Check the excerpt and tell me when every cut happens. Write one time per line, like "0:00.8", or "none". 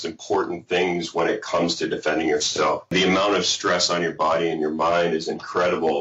0:02.9